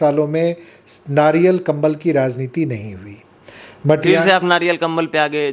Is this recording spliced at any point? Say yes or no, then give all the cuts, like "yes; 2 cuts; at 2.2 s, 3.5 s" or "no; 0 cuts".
no; 0 cuts